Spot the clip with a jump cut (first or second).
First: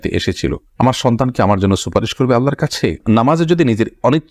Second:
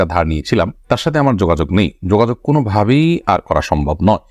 first